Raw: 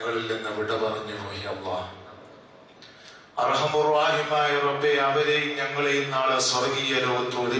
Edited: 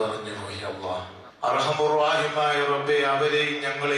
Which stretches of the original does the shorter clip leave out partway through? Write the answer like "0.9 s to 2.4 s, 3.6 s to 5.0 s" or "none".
2.0 s to 3.2 s